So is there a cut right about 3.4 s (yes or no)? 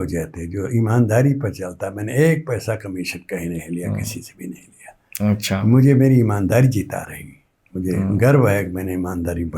no